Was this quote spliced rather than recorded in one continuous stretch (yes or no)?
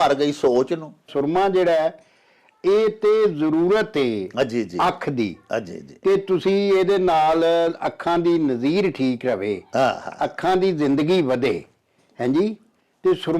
yes